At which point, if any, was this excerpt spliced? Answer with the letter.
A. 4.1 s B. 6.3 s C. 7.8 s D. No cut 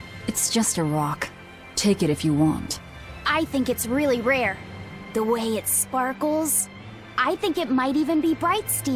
D